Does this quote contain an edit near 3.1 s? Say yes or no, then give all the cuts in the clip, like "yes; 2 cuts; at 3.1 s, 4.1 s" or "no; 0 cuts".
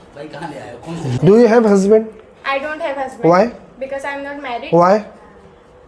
no; 1 cut; at 1.1 s